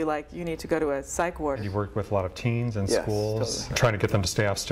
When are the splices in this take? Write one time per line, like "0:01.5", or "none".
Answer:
0:01.6
0:03.6

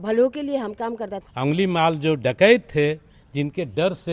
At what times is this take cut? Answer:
0:01.2

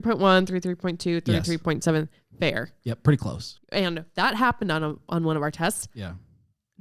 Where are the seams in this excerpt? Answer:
0:03.5

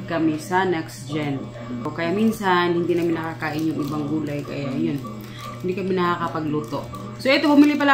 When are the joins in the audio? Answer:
0:01.9

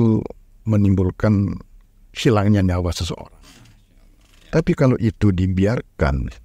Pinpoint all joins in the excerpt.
none

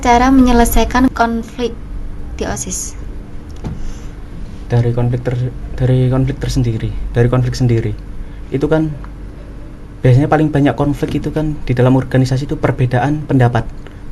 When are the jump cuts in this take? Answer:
0:01.1

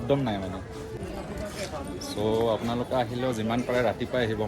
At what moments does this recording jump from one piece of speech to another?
0:00.9

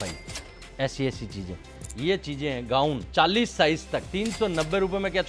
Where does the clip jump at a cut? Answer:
0:01.8
0:03.0
0:04.1

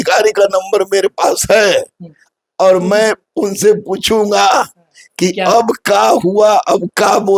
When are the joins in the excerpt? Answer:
none

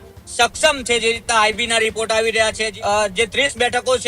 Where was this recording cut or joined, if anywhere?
0:02.7

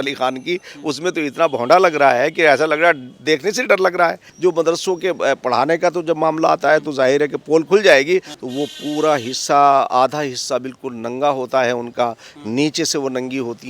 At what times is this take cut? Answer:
0:04.2
0:08.4

